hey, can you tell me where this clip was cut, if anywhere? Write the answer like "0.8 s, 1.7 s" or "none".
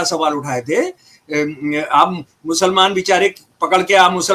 none